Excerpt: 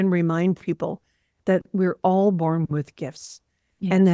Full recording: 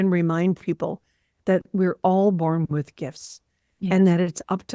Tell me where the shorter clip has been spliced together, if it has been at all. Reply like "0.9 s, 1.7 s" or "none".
none